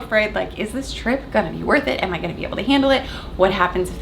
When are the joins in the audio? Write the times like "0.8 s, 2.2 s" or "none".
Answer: none